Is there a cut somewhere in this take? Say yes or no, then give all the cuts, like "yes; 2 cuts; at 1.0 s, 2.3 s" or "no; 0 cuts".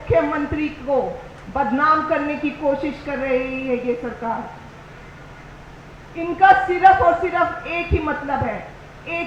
no; 0 cuts